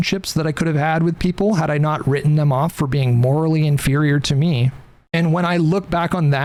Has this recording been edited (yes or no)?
no